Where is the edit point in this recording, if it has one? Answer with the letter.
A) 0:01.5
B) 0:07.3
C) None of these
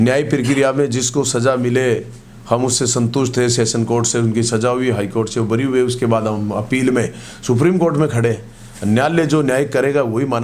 C